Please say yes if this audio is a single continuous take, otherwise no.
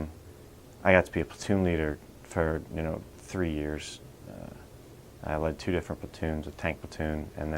no